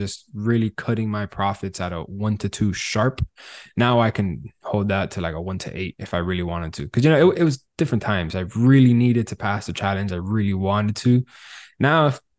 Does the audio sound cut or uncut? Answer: uncut